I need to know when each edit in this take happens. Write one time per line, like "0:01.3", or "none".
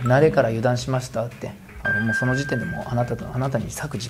none